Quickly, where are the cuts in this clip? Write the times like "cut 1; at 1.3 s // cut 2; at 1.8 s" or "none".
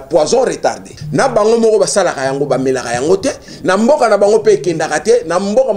cut 1; at 0.9 s